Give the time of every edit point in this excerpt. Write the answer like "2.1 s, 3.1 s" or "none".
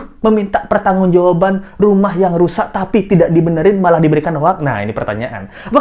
none

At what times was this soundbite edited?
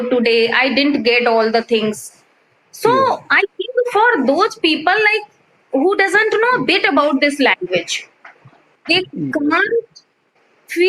none

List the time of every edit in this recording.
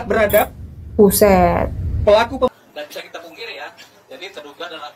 2.5 s

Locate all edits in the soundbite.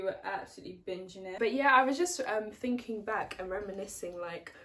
1.3 s

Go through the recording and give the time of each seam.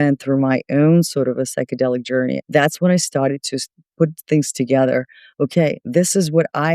2.4 s

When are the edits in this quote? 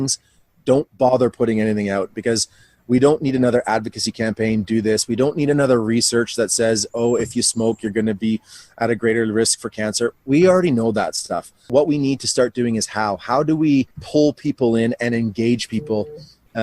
11.6 s, 14.0 s

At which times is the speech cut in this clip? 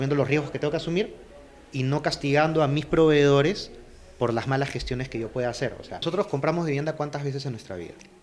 6.0 s

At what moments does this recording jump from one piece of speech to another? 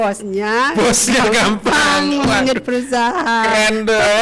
none

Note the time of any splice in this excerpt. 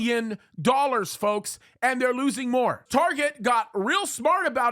2.8 s

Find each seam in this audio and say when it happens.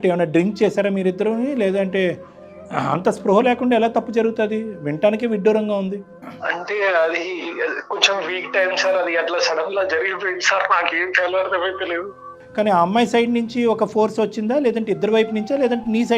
none

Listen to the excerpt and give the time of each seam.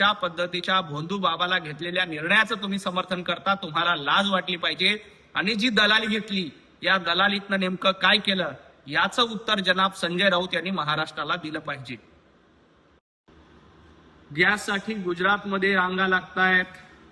13.1 s

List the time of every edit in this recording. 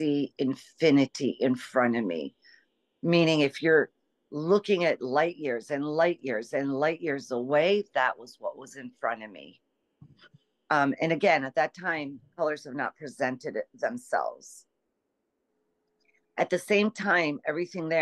none

